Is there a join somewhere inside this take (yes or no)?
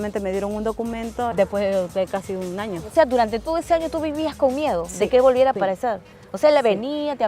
yes